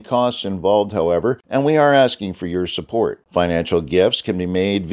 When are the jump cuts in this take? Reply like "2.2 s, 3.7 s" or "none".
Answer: 1.4 s